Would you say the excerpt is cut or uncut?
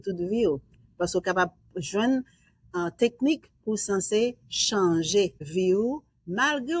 cut